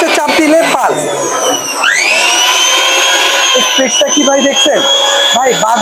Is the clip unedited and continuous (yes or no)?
yes